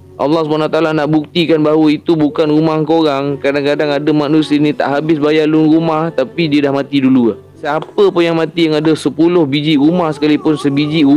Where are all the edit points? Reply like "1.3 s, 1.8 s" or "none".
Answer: 7.5 s